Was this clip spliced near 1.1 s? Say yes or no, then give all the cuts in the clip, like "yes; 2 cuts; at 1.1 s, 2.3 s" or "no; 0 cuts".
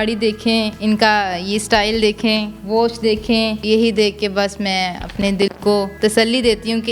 no; 1 cut; at 3.6 s